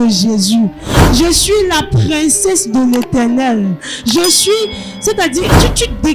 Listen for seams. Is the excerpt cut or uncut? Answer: uncut